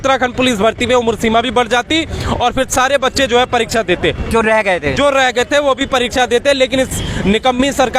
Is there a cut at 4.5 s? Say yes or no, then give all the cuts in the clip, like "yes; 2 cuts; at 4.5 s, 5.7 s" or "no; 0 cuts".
no; 0 cuts